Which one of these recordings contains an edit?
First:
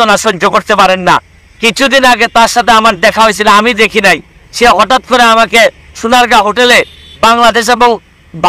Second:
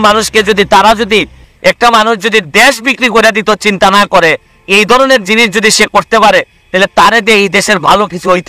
second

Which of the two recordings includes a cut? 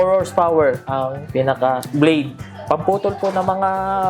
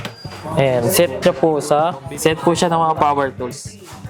first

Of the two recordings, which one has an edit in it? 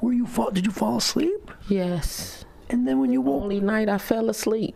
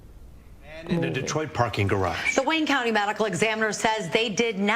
second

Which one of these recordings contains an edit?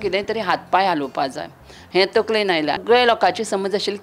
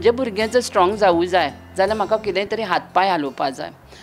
first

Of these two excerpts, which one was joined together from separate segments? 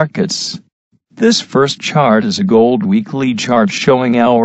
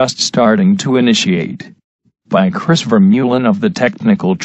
first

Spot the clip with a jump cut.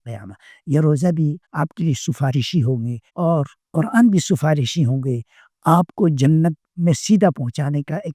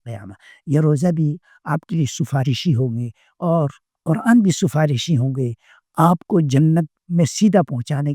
first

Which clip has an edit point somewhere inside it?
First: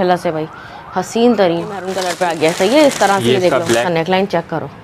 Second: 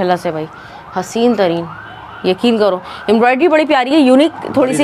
first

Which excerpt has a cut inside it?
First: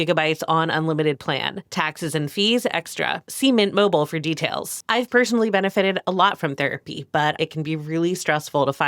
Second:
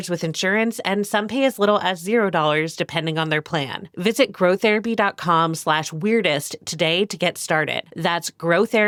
first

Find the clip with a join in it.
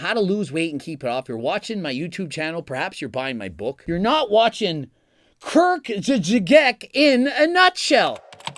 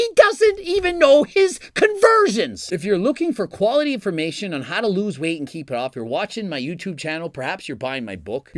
second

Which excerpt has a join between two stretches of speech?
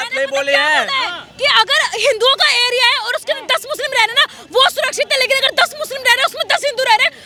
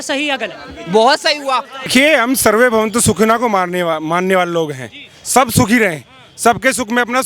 second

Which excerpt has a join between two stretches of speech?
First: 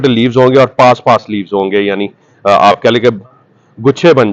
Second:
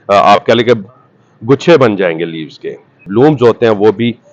second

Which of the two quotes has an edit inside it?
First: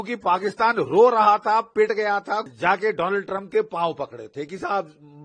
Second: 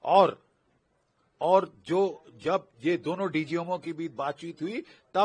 first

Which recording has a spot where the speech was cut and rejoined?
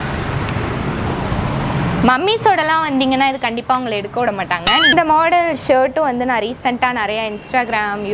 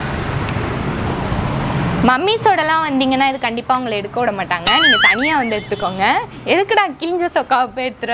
first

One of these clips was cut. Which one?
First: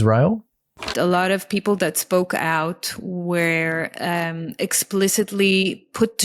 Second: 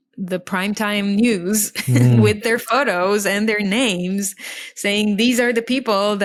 first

